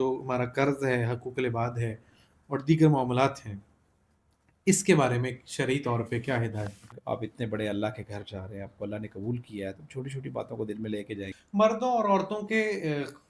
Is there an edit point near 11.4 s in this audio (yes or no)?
yes